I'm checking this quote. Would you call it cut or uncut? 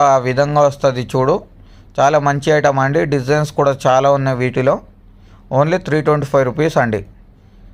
uncut